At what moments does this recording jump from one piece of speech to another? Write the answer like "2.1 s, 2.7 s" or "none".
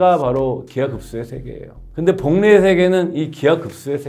none